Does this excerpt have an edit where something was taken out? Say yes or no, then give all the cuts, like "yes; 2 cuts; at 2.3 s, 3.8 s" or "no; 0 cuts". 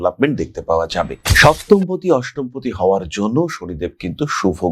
yes; 1 cut; at 1.3 s